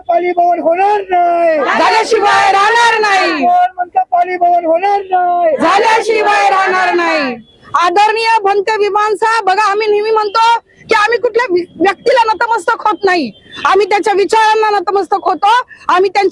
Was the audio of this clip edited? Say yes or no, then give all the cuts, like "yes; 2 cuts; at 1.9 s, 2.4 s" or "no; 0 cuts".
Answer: no; 0 cuts